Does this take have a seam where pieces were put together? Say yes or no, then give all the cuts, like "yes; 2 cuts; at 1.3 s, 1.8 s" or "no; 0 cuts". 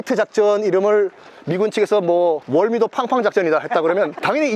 no; 0 cuts